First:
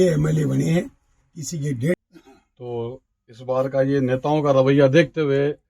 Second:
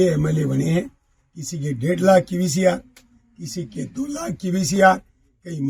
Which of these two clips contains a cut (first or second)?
first